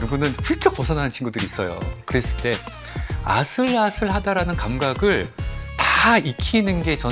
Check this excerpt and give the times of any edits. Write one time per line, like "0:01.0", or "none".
0:01.9